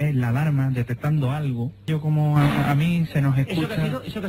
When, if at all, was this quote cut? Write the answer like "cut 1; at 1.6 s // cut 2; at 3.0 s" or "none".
cut 1; at 1.9 s